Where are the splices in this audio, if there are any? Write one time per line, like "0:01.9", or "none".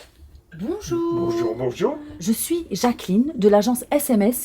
0:02.1